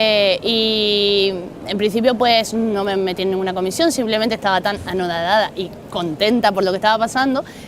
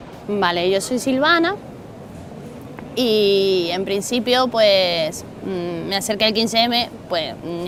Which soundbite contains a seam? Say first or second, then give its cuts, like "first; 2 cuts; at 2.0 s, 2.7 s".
first; 1 cut; at 1.1 s